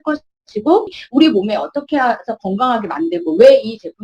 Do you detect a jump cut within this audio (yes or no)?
yes